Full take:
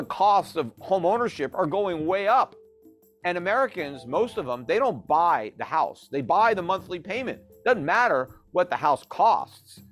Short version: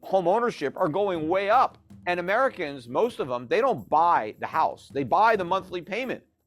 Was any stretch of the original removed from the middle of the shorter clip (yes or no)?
yes